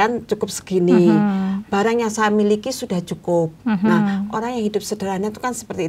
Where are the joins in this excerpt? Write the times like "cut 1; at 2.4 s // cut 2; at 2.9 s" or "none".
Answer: none

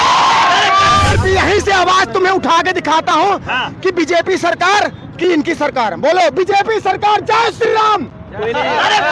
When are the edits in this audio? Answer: cut 1; at 1.1 s

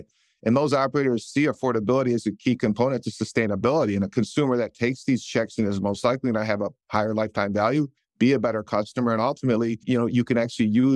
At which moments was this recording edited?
cut 1; at 8.0 s // cut 2; at 9.8 s

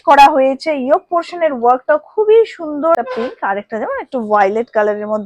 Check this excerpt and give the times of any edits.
cut 1; at 3.0 s

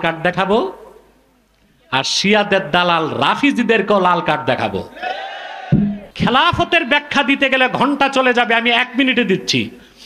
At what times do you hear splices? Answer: cut 1; at 6.1 s

